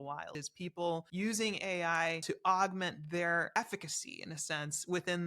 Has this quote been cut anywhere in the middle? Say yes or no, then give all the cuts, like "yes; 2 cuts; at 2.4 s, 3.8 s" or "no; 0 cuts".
yes; 3 cuts; at 0.8 s, 2.2 s, 3.6 s